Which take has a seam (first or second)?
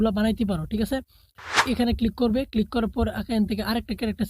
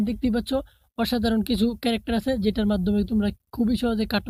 first